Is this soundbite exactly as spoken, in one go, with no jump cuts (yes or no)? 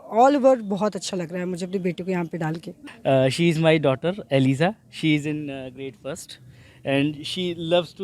no